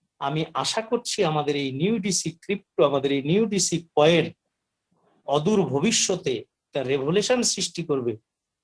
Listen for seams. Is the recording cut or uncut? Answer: uncut